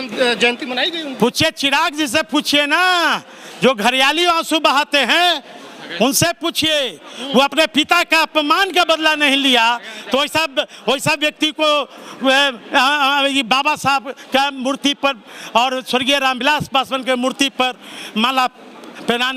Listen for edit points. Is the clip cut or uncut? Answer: uncut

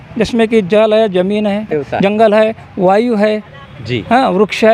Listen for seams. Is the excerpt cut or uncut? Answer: cut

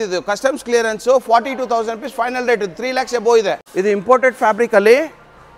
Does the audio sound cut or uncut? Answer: cut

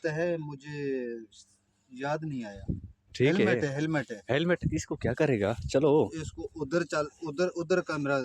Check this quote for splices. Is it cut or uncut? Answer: uncut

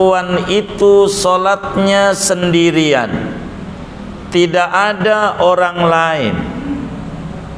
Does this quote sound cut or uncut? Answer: uncut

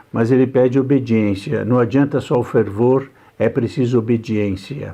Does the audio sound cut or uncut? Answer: uncut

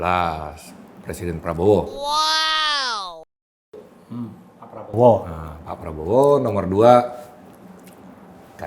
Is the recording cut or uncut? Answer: uncut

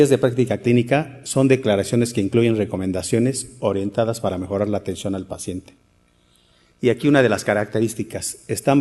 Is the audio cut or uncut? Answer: uncut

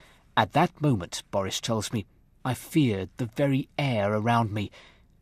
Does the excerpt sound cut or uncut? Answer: uncut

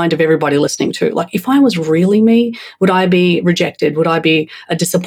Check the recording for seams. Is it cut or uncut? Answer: uncut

